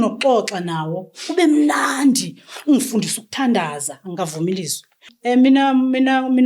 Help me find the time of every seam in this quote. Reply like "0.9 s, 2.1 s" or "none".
5.1 s